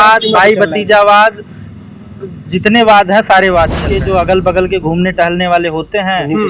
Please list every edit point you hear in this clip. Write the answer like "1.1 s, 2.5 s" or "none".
3.9 s